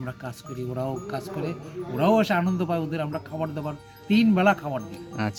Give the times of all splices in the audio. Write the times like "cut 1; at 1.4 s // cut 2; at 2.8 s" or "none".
none